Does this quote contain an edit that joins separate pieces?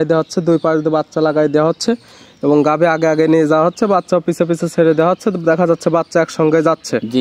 no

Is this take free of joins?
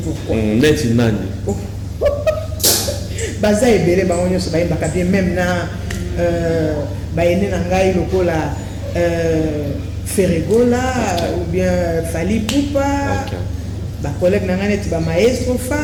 yes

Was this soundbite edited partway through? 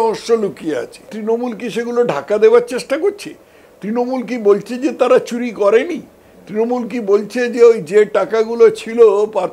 yes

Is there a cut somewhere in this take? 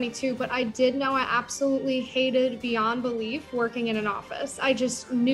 no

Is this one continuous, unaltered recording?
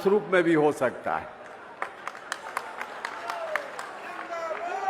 yes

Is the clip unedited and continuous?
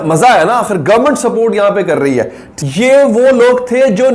no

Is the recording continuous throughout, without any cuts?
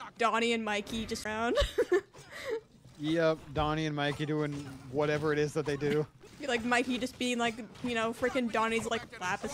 no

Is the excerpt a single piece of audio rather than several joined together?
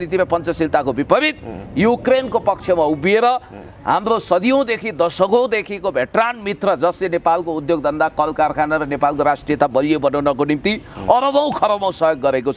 yes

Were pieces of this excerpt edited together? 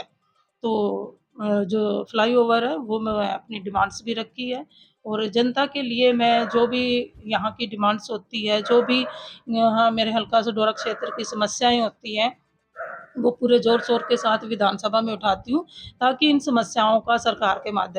no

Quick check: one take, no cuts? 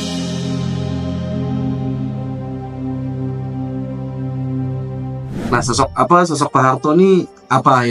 no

